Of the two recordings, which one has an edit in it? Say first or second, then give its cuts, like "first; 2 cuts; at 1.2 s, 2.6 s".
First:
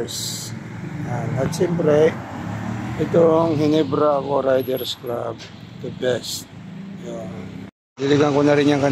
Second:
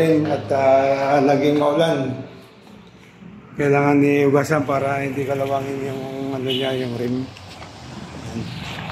first; 1 cut; at 7.9 s